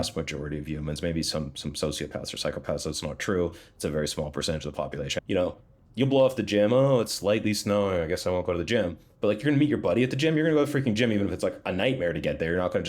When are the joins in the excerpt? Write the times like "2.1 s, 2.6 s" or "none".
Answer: 5.1 s